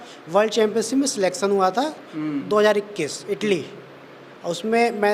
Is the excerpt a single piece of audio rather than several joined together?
yes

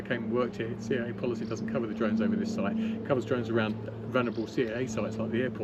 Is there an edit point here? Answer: no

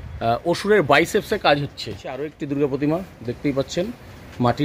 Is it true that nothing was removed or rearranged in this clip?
no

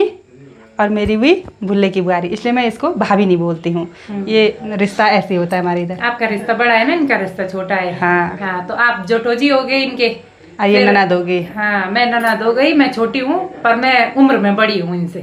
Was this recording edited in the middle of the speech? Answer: no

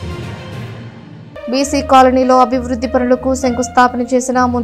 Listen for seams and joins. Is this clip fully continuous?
no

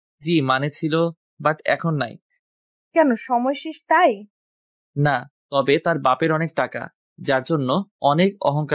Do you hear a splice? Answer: no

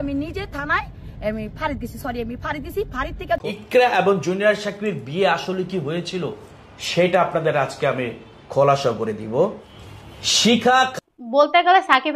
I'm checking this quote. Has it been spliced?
yes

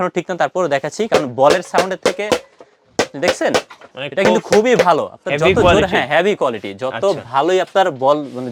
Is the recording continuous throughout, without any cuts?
yes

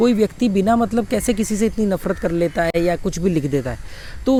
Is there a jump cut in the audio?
no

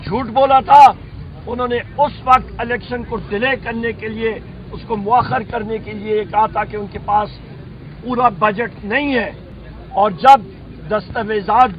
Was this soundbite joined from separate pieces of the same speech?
no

